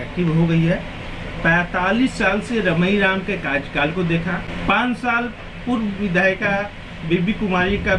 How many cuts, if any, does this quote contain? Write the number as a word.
one